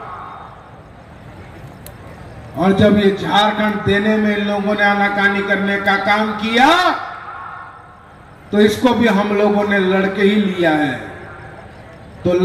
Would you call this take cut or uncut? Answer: uncut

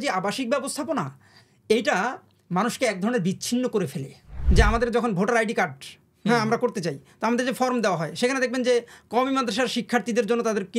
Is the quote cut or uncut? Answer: cut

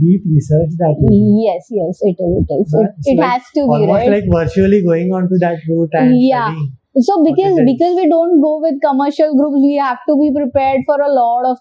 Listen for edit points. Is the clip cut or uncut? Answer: uncut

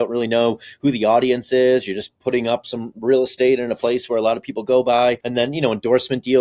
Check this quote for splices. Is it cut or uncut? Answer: cut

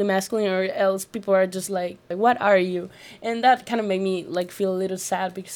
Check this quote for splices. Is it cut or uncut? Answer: cut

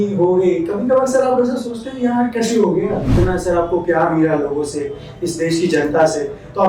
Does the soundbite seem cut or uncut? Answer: cut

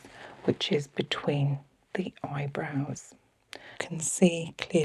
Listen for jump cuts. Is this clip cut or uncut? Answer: cut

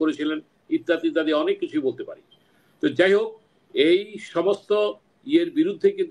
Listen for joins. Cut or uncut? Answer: uncut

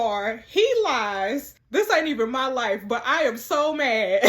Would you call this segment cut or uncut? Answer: cut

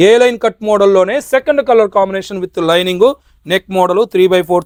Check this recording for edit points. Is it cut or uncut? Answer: uncut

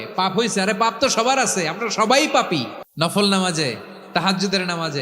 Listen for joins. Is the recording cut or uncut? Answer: cut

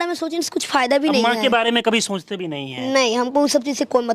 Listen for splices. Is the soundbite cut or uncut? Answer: uncut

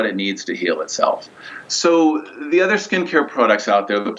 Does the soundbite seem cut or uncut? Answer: uncut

